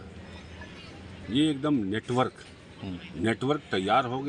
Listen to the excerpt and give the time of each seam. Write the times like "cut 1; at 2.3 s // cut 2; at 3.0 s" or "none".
none